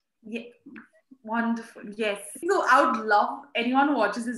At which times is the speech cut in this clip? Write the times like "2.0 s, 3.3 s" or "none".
2.4 s